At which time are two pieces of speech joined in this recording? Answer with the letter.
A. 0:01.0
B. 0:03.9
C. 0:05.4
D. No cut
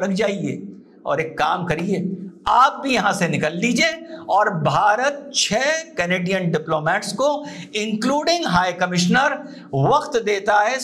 D